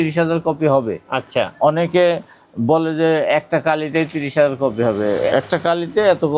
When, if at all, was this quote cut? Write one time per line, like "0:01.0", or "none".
0:05.3